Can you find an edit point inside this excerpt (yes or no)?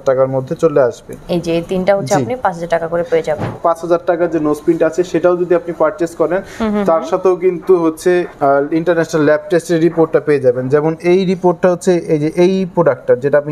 yes